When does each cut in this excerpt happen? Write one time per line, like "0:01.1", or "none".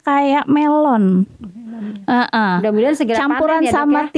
none